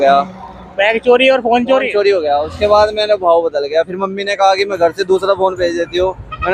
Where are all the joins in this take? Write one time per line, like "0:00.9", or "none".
none